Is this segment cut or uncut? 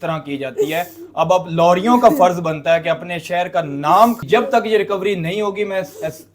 cut